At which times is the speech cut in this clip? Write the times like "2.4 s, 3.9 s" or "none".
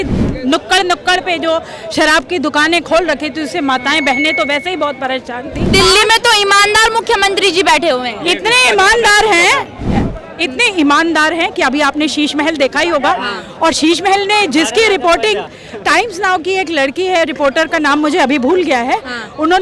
5.7 s